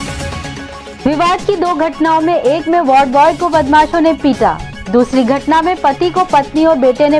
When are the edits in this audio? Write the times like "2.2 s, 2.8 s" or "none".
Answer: 0.9 s